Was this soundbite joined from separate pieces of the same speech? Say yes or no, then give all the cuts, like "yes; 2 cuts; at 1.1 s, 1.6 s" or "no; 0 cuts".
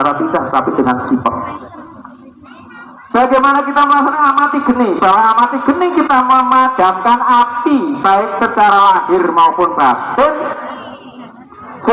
no; 0 cuts